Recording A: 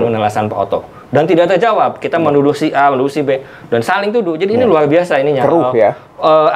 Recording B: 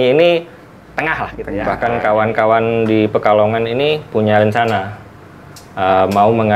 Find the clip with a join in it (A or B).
B